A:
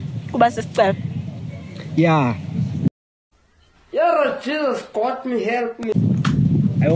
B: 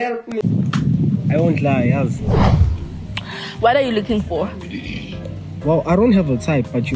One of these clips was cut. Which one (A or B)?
B